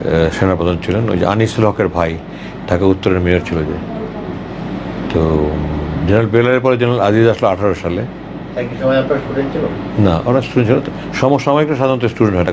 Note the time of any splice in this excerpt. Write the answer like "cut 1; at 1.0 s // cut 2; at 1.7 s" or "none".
none